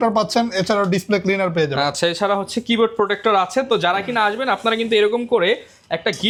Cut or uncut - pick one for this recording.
uncut